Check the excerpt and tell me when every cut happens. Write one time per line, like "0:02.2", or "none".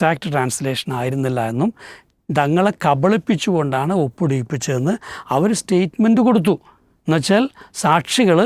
none